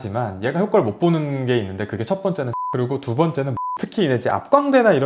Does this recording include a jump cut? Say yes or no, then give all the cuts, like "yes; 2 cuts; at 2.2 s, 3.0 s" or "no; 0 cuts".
yes; 2 cuts; at 2.6 s, 3.6 s